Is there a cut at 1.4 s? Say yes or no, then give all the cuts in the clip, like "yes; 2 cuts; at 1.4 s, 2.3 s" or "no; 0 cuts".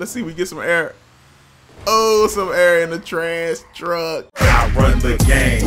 no; 1 cut; at 4.3 s